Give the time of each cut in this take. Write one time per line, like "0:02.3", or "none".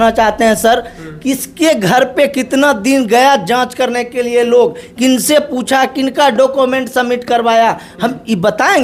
none